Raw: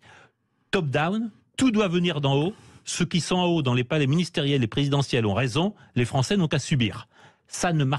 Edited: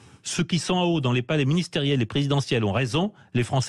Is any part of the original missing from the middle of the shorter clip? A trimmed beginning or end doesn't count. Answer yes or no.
no